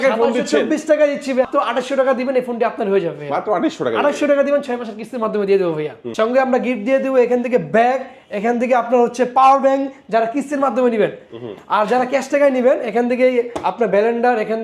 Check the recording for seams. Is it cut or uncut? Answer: cut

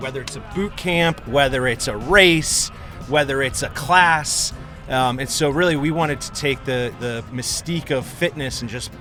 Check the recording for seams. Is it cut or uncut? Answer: uncut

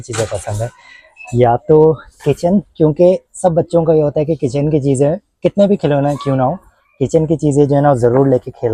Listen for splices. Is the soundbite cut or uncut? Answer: uncut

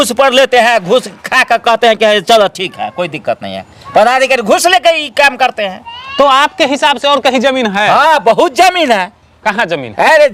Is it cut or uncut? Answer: uncut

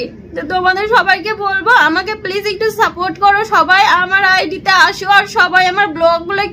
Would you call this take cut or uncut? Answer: uncut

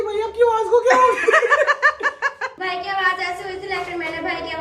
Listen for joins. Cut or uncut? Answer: cut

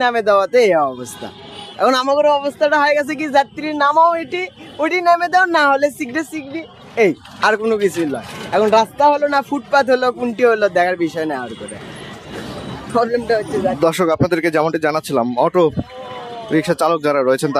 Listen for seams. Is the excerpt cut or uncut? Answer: uncut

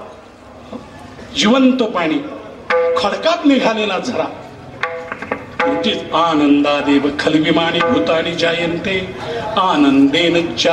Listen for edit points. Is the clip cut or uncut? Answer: uncut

